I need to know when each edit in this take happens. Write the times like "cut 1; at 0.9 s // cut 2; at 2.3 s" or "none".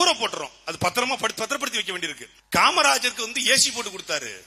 cut 1; at 2.3 s